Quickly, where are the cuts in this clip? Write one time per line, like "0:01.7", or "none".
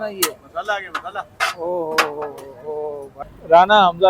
0:03.1